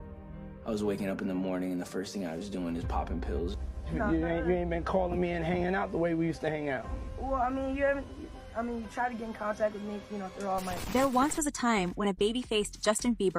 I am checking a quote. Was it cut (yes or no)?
no